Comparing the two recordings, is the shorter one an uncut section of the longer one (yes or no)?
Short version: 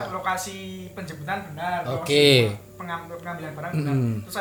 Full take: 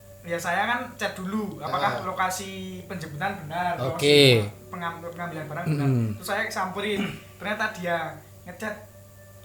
yes